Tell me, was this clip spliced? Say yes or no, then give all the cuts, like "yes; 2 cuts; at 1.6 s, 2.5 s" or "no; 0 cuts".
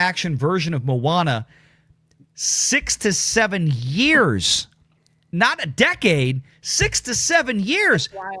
no; 0 cuts